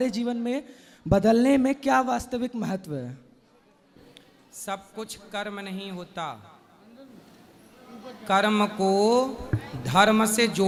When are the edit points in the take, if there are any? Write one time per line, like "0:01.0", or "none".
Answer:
none

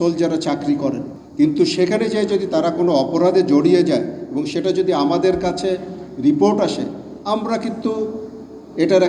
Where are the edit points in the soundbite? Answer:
0:01.2

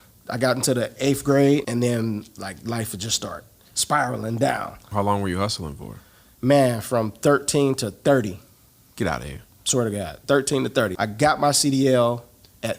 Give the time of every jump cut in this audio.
0:01.7
0:04.9
0:10.9

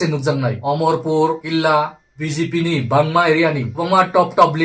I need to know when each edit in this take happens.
none

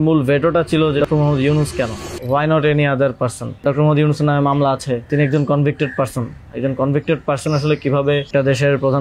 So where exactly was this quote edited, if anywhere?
0:01.0
0:02.1
0:03.6
0:05.1
0:08.3

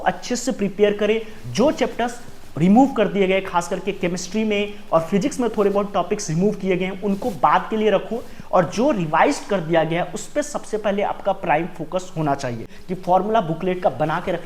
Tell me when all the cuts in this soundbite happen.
0:12.8

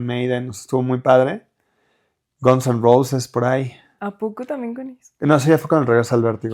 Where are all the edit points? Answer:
none

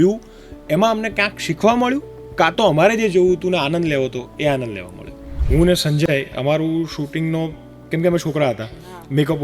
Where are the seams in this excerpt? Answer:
0:05.3

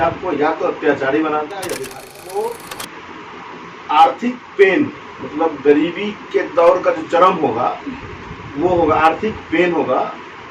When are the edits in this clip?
0:02.3

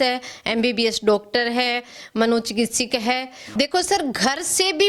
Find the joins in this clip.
0:03.4

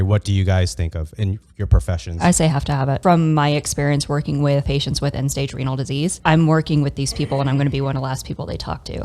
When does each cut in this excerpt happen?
0:03.0
0:04.7
0:06.2

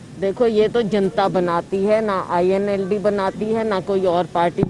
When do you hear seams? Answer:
none

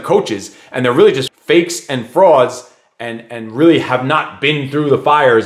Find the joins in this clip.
0:01.3

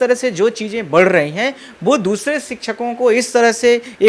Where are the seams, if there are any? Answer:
none

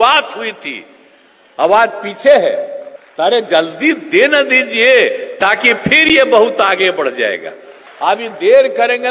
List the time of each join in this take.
0:07.8

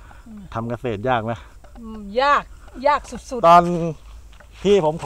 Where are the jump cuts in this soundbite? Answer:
0:03.2

